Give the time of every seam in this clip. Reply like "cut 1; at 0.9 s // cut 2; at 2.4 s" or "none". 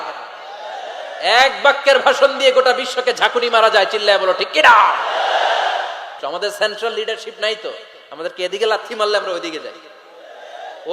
cut 1; at 6.1 s